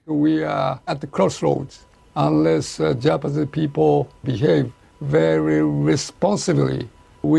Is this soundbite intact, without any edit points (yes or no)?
no